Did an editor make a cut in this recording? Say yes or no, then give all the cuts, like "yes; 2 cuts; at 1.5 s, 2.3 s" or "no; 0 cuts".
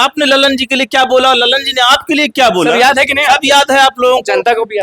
no; 0 cuts